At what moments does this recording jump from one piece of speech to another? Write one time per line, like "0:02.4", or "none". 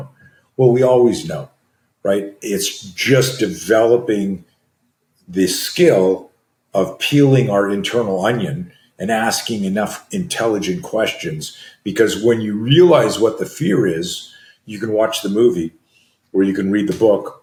none